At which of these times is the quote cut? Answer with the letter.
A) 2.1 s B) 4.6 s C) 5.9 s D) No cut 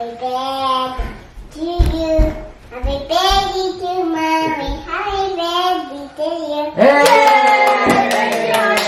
D